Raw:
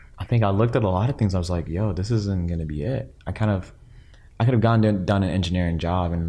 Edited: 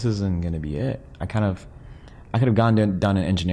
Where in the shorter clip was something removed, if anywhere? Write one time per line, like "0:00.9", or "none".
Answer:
none